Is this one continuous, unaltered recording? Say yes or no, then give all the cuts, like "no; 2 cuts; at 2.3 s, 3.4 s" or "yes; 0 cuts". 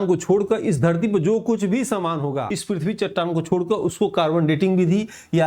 no; 1 cut; at 2.5 s